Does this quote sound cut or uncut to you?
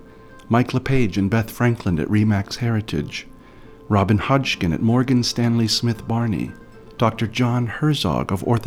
uncut